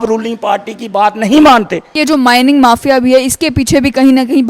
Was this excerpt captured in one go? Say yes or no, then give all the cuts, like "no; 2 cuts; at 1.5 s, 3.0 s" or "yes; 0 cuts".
no; 1 cut; at 1.9 s